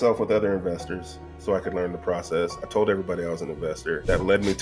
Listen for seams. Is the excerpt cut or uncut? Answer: uncut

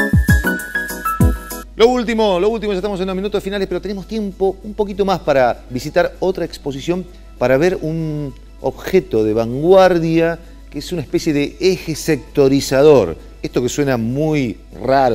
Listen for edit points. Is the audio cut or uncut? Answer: cut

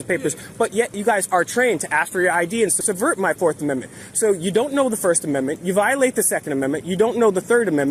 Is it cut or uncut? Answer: cut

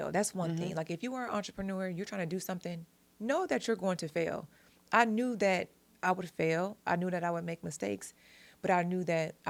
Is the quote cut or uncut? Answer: uncut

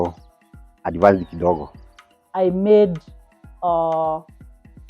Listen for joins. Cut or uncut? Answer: cut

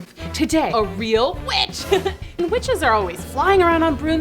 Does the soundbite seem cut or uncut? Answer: cut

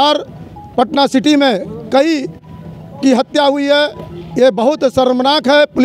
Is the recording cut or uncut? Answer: uncut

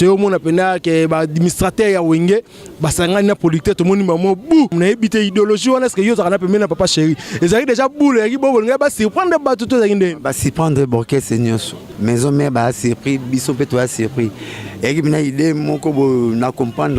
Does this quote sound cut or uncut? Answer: cut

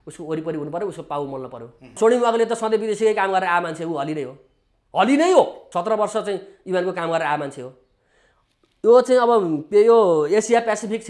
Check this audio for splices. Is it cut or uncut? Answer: cut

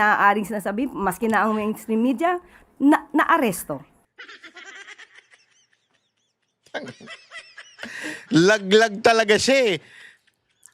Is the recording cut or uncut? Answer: uncut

